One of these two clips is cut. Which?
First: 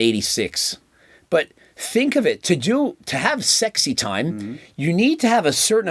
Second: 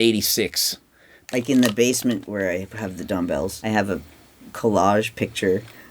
second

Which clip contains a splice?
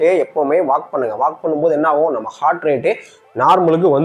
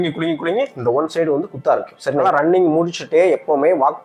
second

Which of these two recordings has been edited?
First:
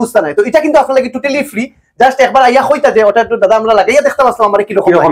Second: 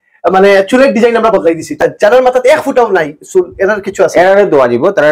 second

